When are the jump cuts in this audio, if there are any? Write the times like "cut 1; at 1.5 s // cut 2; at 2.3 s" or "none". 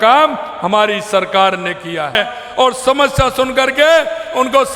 cut 1; at 2.1 s